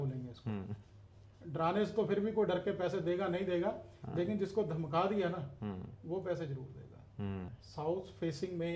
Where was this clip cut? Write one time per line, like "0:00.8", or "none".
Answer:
0:07.6